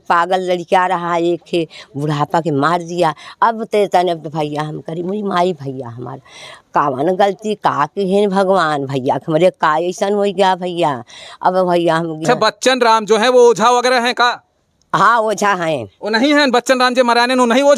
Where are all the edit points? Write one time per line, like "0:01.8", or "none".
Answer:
0:12.2